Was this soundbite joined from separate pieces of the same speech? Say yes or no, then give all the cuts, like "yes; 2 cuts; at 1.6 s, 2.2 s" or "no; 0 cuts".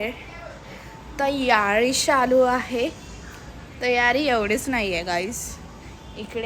no; 0 cuts